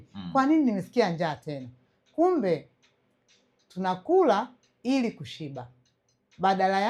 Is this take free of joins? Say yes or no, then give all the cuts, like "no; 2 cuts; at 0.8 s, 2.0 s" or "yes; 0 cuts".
yes; 0 cuts